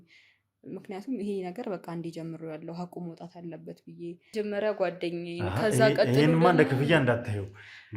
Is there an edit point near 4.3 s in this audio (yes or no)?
yes